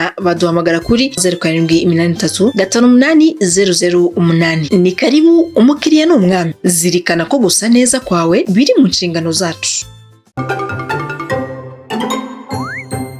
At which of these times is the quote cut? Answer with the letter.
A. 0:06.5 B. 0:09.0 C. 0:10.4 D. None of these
C